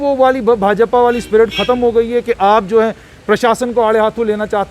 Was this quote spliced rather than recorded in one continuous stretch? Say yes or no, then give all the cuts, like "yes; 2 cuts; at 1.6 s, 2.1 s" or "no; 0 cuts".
no; 0 cuts